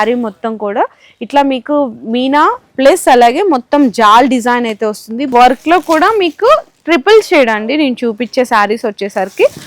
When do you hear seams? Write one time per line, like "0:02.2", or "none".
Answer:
0:05.3